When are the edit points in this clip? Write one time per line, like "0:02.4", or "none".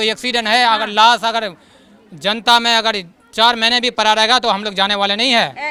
none